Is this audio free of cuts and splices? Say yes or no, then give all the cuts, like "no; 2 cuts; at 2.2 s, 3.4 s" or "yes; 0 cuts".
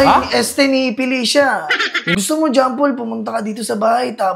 no; 1 cut; at 2.2 s